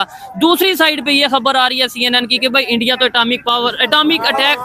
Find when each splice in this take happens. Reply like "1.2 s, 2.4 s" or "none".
none